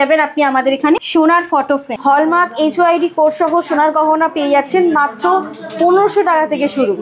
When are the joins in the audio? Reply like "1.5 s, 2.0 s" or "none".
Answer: 1.0 s, 1.9 s